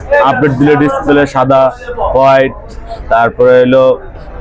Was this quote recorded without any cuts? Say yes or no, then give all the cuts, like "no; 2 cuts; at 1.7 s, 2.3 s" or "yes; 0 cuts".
yes; 0 cuts